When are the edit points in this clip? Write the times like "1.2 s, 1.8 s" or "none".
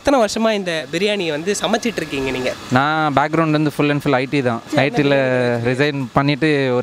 2.6 s, 4.7 s